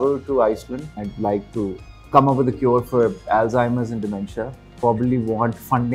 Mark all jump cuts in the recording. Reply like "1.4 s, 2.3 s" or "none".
1.0 s, 1.9 s, 4.6 s

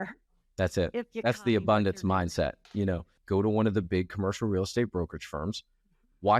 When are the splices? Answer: 3.1 s

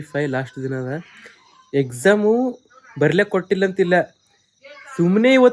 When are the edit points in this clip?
none

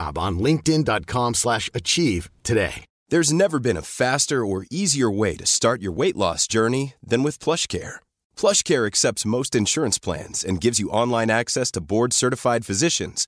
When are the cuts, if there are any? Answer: none

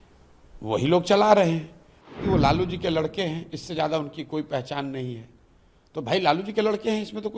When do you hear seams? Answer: 2.2 s

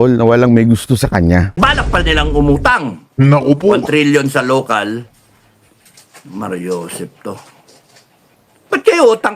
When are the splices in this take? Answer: 1.5 s

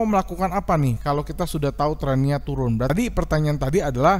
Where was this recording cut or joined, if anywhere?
2.9 s

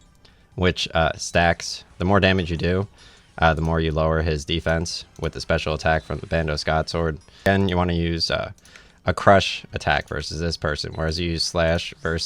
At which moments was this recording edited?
7.5 s

